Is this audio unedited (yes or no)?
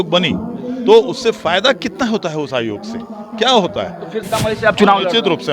no